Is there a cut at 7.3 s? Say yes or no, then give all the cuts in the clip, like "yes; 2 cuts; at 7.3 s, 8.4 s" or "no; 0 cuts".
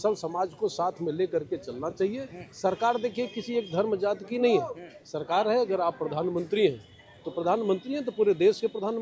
no; 0 cuts